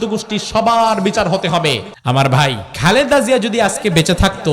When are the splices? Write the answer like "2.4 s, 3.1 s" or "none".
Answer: 1.9 s, 2.7 s